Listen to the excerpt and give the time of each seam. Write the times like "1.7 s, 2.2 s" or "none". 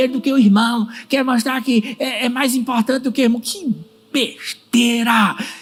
none